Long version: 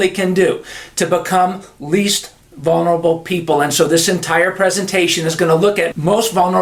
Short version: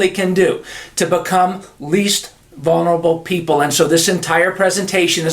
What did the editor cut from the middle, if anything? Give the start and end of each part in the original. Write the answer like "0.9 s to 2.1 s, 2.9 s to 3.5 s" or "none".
none